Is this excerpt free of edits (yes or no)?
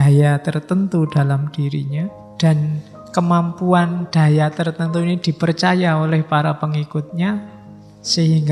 no